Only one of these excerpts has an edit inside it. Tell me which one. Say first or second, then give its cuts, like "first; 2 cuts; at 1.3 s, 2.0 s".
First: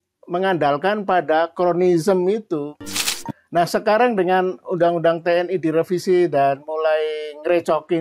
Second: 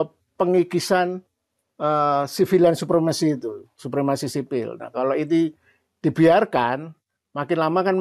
first; 1 cut; at 3.1 s